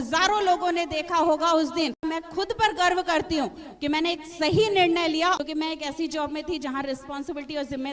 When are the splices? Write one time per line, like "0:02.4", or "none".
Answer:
0:02.0
0:05.4